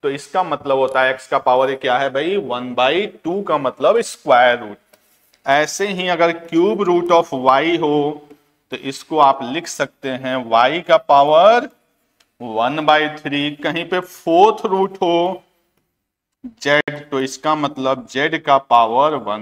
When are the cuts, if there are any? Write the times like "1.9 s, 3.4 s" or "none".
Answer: none